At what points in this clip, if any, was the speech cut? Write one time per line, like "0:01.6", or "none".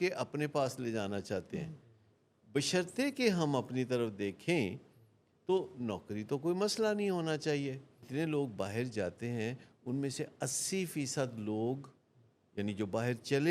0:08.0

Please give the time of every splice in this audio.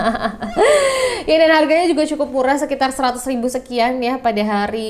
none

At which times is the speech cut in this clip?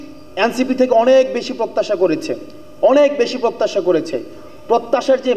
none

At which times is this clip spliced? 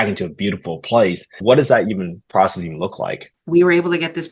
0:01.4
0:03.3

